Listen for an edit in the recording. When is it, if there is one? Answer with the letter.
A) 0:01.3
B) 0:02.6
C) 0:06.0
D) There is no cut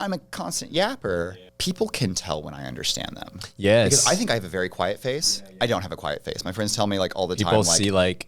A